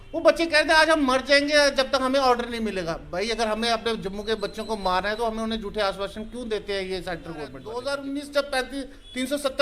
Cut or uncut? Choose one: cut